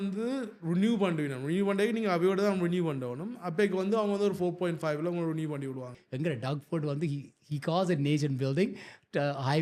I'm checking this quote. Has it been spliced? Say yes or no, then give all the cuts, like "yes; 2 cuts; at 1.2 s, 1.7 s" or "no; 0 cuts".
yes; 1 cut; at 6.0 s